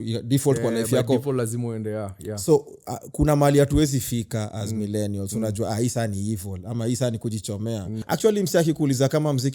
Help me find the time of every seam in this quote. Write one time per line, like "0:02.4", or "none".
0:07.9